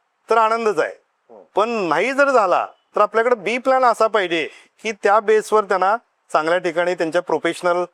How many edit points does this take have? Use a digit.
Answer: 0